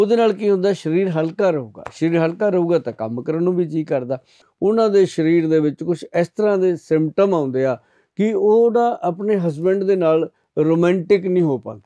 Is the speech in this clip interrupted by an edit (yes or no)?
yes